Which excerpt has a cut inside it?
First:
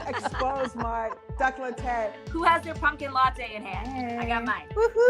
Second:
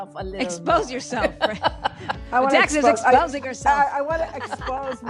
first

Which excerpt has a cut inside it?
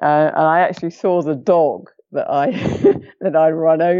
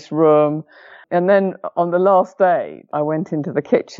second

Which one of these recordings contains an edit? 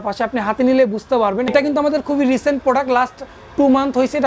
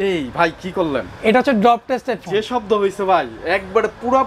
first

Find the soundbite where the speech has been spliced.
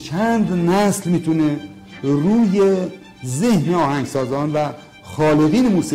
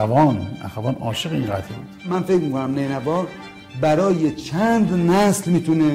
second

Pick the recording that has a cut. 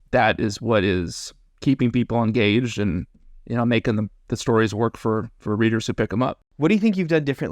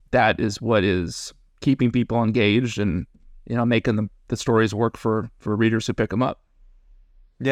first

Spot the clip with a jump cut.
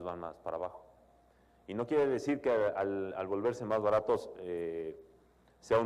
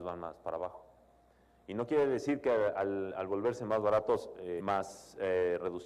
first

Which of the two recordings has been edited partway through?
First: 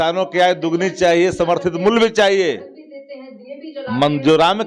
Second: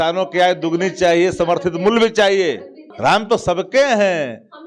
second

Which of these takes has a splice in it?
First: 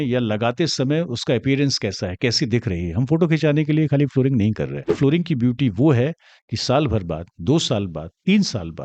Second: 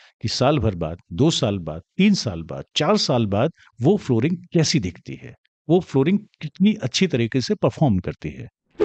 first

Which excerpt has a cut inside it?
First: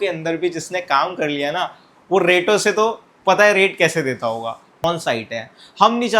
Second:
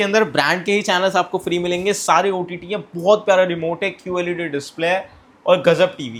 first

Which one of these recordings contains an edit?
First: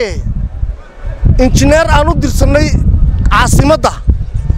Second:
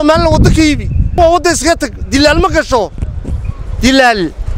second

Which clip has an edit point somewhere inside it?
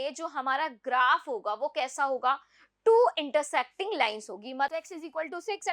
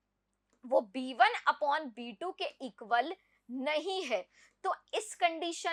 first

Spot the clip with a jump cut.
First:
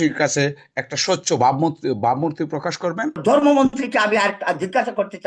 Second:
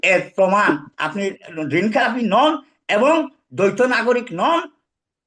first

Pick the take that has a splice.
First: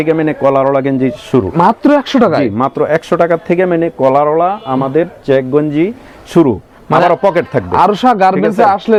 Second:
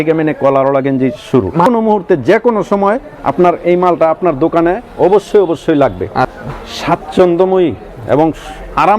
second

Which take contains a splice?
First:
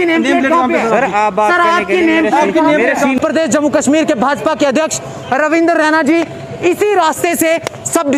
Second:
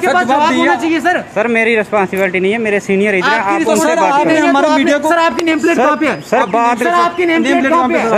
first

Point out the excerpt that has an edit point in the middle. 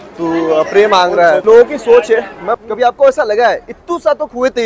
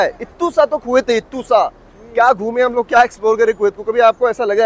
first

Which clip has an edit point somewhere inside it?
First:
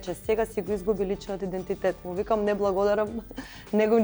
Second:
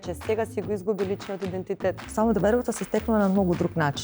second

